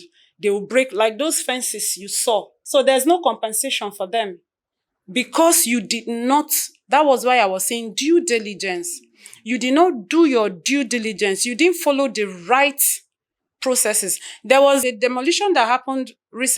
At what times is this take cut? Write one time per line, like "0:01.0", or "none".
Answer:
0:02.6
0:14.8

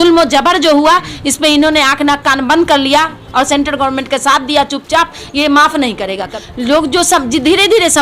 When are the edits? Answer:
0:06.4

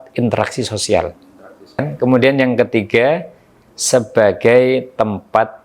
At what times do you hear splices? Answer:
0:01.9

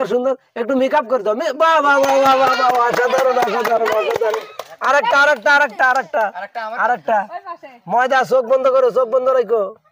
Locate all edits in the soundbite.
none

